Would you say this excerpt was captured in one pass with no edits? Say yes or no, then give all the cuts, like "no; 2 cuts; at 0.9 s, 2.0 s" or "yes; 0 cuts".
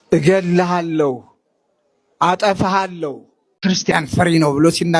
no; 1 cut; at 3.5 s